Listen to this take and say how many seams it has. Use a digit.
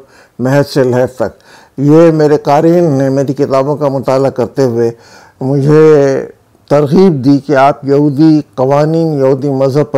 0